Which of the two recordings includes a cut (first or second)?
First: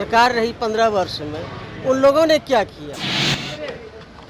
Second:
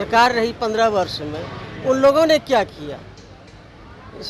first